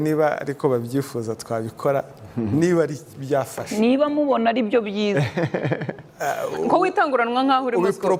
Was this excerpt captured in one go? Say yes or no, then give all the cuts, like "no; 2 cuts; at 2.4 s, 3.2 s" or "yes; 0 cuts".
yes; 0 cuts